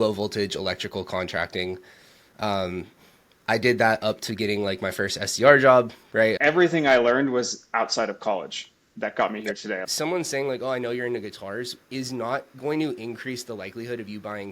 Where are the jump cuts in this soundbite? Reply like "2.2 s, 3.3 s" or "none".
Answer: 6.4 s, 9.8 s